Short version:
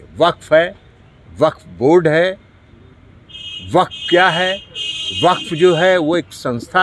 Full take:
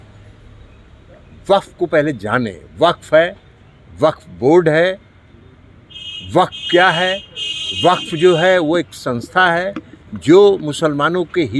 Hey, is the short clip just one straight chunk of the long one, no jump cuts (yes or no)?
yes